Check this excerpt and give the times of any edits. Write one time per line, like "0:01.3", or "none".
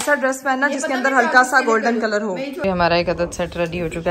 0:02.6